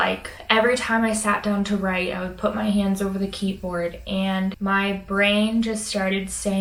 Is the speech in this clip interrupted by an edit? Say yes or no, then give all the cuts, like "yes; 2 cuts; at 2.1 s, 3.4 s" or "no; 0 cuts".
no; 0 cuts